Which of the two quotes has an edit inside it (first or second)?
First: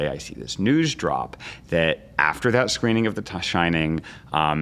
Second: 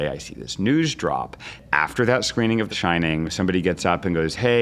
second